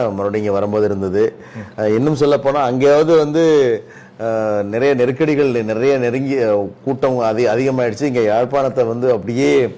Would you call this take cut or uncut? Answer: uncut